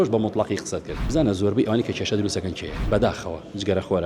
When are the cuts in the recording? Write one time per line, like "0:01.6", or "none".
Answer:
0:00.9
0:02.7